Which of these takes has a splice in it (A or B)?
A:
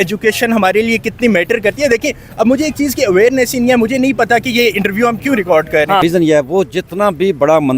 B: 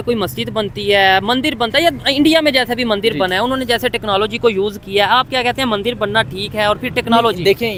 A